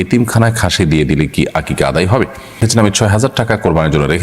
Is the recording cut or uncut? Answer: cut